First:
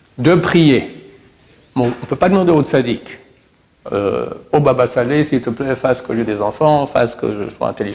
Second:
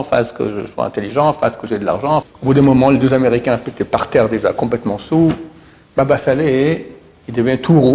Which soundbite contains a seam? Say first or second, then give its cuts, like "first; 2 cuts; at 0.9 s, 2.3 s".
second; 1 cut; at 2.2 s